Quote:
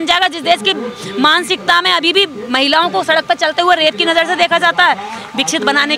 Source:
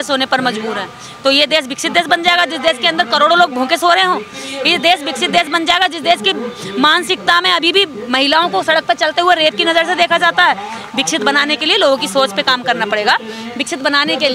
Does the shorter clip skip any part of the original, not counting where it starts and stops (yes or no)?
no